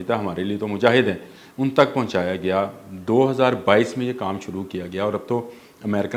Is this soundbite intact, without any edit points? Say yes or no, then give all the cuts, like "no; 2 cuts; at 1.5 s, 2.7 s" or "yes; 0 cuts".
yes; 0 cuts